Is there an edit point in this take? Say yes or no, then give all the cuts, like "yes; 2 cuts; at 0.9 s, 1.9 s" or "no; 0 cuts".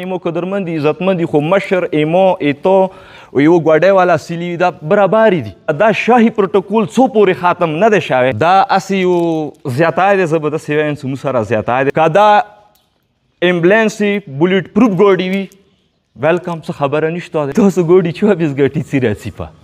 yes; 4 cuts; at 5.7 s, 8.4 s, 11.9 s, 17.5 s